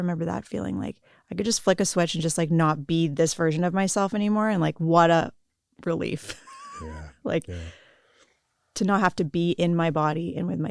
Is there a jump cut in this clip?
no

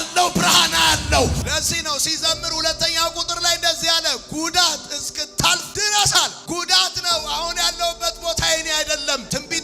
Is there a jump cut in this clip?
no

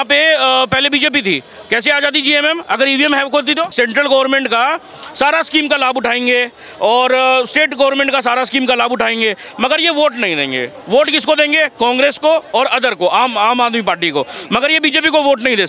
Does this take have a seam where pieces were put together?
yes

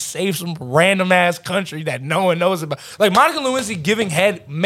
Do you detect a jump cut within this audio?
yes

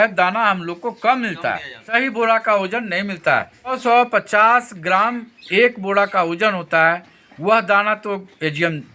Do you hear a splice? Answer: yes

